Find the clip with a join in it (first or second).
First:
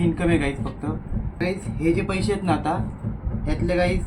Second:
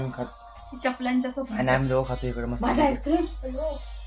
first